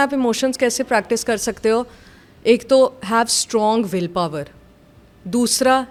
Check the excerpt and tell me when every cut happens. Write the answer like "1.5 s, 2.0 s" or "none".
none